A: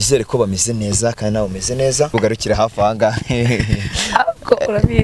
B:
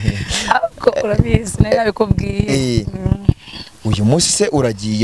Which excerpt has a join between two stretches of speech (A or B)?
A